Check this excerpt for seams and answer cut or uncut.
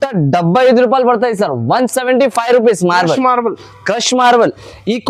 uncut